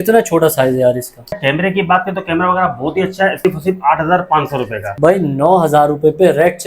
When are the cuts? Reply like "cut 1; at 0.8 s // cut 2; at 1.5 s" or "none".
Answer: cut 1; at 1.4 s // cut 2; at 3.4 s // cut 3; at 4.8 s